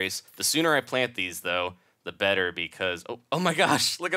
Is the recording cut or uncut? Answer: uncut